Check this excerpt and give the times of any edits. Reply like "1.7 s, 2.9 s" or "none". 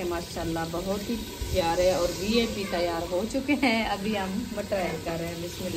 none